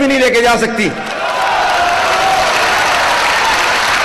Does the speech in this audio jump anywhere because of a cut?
no; 0 cuts

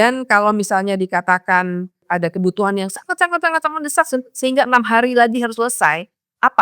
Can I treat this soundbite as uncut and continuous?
no; 1 cut; at 2.0 s

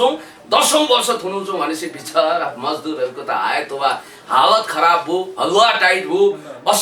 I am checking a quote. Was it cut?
no; 0 cuts

